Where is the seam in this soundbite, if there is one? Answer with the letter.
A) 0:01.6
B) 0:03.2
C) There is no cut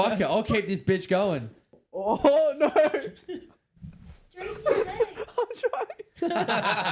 A